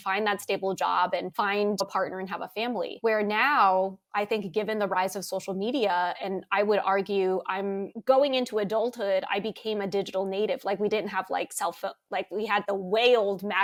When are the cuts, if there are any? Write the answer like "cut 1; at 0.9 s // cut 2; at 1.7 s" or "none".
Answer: none